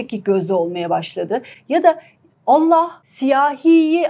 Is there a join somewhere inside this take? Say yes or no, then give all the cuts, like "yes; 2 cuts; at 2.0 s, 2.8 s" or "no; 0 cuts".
yes; 1 cut; at 3.0 s